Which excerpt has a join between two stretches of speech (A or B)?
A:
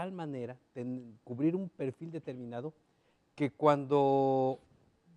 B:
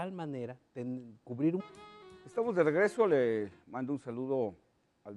A